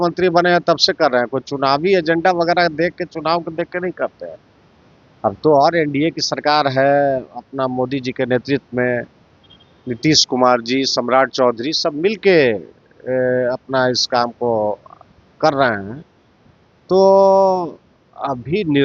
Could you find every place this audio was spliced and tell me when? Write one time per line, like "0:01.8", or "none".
none